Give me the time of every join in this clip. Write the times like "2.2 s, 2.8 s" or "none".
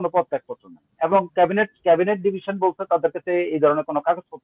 none